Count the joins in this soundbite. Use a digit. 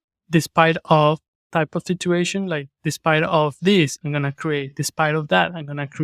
1